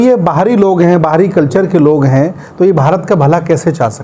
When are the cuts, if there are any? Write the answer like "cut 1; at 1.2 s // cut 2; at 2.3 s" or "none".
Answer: none